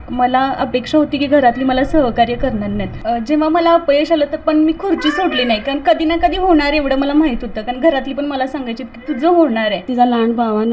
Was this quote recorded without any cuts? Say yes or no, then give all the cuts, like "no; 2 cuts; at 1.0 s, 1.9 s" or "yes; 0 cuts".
no; 2 cuts; at 3.0 s, 9.9 s